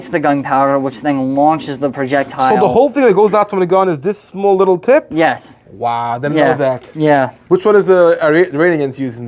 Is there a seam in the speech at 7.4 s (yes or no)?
yes